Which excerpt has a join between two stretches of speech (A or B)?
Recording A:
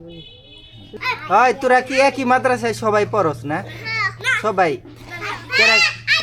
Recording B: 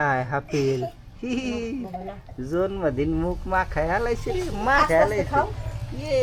A